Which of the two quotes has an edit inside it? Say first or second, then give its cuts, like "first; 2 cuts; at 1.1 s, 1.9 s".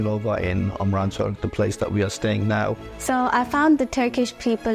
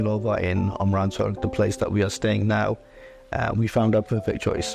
first; 1 cut; at 2.9 s